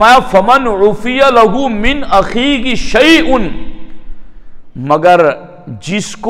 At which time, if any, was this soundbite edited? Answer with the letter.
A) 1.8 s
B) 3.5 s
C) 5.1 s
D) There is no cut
D